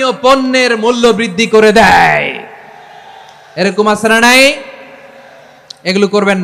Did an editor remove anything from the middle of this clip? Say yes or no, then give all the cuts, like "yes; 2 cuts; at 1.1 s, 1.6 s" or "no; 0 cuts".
no; 0 cuts